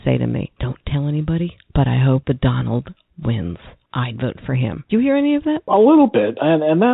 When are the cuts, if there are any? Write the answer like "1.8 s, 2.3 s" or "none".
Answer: 3.7 s, 4.8 s, 5.7 s